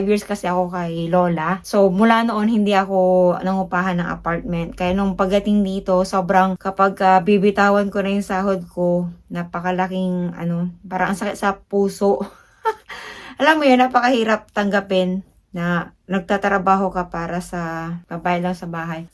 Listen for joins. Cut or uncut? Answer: uncut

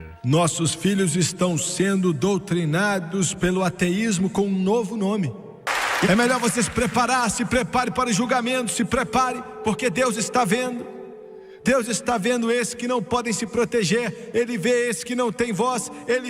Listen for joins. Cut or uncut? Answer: cut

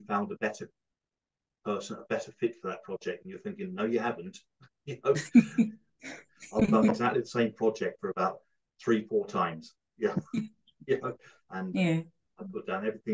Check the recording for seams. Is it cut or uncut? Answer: uncut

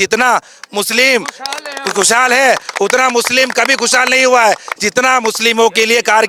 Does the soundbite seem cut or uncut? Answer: uncut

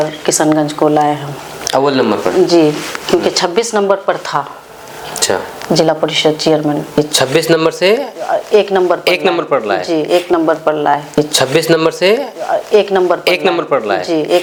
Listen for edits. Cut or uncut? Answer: uncut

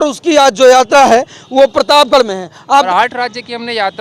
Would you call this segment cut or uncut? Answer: cut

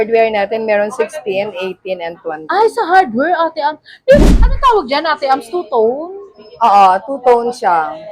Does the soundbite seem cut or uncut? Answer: cut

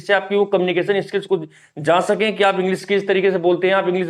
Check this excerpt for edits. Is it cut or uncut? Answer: uncut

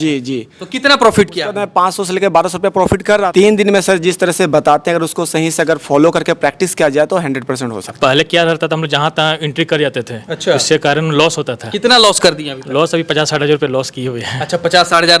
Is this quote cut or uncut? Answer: cut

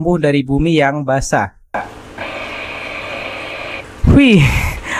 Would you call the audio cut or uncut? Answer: cut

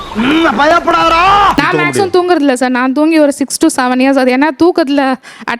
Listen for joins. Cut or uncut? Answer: cut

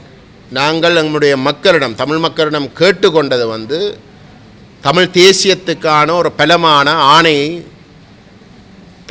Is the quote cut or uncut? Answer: uncut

